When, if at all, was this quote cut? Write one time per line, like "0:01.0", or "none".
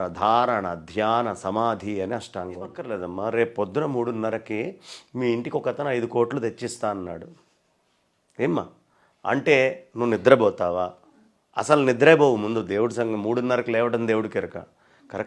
0:02.8